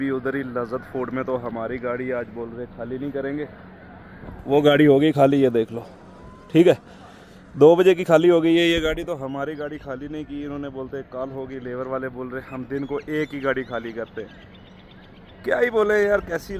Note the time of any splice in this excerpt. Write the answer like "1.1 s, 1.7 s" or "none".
none